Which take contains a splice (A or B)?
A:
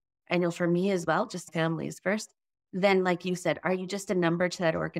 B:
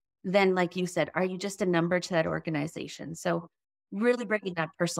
A